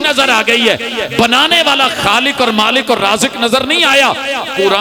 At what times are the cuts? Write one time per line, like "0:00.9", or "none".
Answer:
none